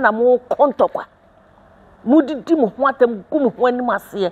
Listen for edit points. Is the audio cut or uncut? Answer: uncut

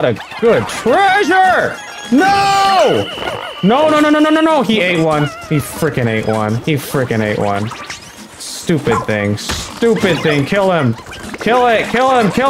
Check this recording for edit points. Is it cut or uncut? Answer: uncut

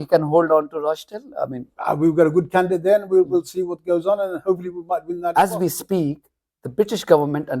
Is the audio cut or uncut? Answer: cut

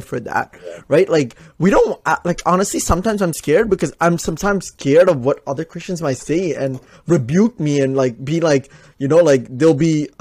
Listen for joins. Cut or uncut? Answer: uncut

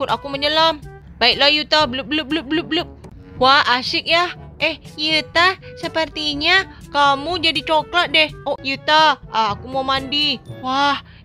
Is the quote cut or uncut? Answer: cut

